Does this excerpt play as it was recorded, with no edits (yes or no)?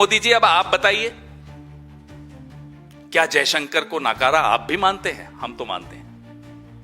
no